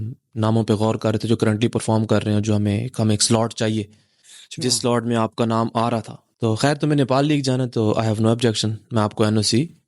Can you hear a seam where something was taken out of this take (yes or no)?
yes